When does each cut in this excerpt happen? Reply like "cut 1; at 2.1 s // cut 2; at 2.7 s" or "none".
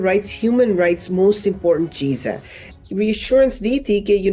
cut 1; at 2.7 s